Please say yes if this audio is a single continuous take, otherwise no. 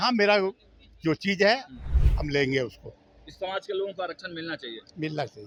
yes